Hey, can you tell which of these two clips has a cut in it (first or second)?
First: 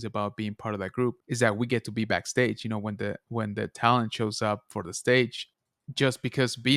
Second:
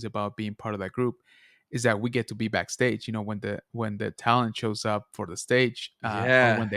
first